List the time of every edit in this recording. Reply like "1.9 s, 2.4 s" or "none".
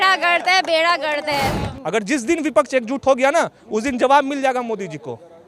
1.7 s